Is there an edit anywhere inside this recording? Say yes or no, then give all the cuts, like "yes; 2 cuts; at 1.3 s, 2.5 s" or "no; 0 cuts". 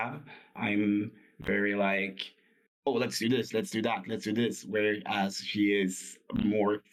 no; 0 cuts